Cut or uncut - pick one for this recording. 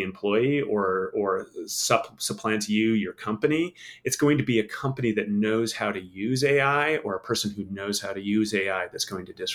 uncut